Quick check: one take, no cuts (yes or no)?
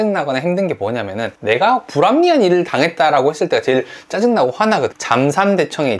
no